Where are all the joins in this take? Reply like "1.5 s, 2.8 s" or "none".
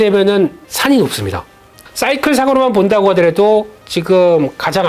1.7 s